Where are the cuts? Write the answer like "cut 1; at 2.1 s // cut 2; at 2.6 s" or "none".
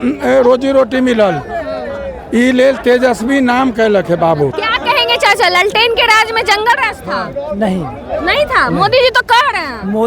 cut 1; at 4.5 s